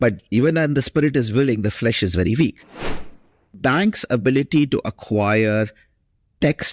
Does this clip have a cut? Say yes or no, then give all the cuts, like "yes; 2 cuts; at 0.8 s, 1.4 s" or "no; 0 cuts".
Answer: yes; 1 cut; at 3.0 s